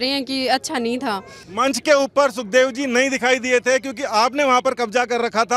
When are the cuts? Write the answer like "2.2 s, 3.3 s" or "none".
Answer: 1.4 s

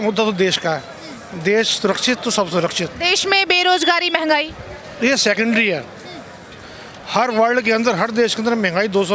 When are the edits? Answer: none

